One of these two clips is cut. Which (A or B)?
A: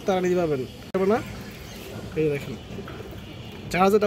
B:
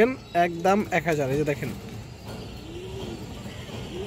A